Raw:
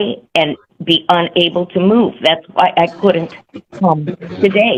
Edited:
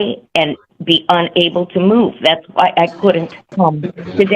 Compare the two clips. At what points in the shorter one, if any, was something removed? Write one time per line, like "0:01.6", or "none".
0:03.4

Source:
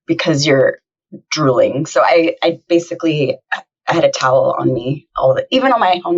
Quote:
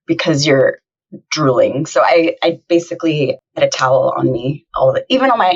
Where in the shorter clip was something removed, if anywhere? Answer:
0:03.6

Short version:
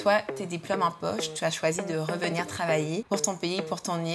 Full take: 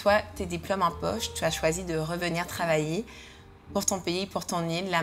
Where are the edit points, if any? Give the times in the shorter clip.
0:03.0

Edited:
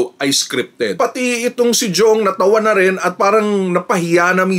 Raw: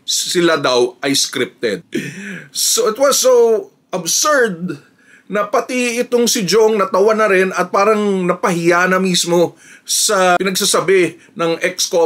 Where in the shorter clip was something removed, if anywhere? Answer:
0:01.0

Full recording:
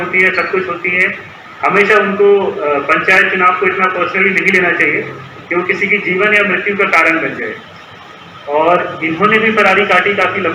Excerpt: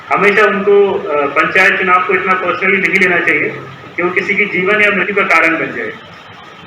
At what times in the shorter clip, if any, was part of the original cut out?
0:05.1

